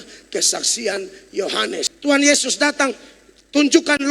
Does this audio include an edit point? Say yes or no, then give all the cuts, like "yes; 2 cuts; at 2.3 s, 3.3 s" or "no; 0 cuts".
yes; 1 cut; at 1.9 s